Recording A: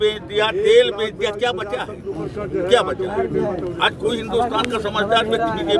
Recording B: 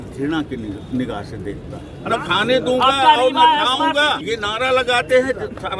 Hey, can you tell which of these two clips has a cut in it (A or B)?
B